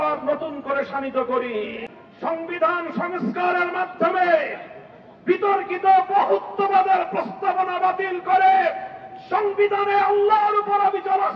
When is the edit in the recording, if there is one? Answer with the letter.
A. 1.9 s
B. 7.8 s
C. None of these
A